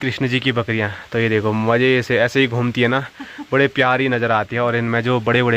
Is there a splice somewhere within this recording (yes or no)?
no